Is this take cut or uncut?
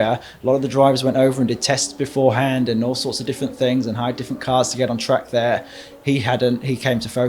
uncut